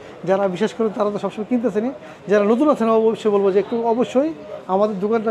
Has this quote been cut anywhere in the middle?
no; 0 cuts

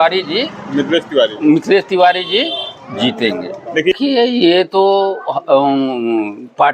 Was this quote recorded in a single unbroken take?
no; 1 cut; at 3.9 s

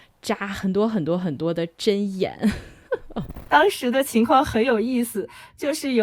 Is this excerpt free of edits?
no; 1 cut; at 3.4 s

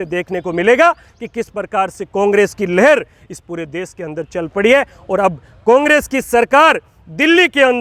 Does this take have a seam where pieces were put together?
no; 0 cuts

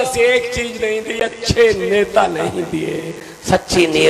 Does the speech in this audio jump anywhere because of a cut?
no; 0 cuts

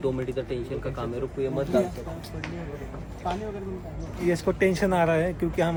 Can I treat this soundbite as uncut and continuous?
yes; 0 cuts

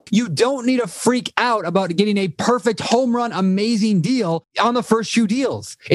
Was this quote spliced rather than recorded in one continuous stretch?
yes; 1 cut; at 4.5 s

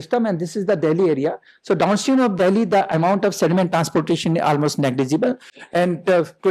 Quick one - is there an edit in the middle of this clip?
no; 0 cuts

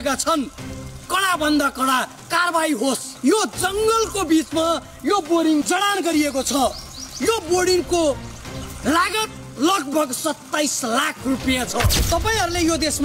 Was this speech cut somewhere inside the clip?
yes; 2 cuts; at 3.1 s, 12.0 s

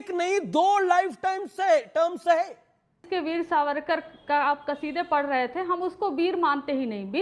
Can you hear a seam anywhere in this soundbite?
yes; 1 cut; at 3.0 s

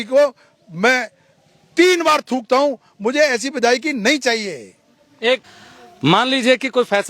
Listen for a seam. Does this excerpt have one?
yes; 1 cut; at 5.5 s

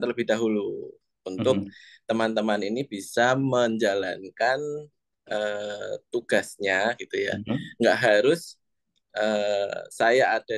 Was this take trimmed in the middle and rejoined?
no; 0 cuts

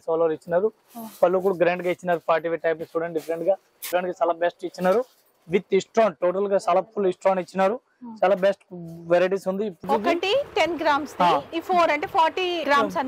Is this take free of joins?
no; 2 cuts; at 3.8 s, 9.8 s

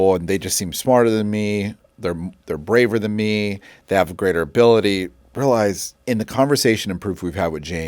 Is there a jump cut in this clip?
yes; 1 cut; at 5.9 s

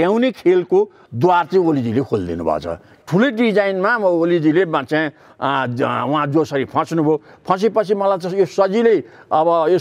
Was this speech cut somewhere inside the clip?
yes; 1 cut; at 2.9 s

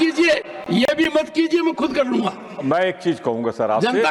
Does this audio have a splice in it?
no; 0 cuts

